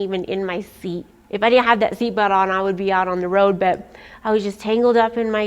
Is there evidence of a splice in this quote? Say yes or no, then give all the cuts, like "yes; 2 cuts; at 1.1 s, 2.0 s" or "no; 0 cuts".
yes; 1 cut; at 1.1 s